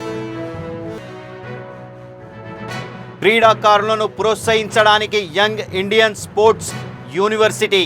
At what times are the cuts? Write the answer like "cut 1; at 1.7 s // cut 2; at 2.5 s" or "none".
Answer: cut 1; at 1.0 s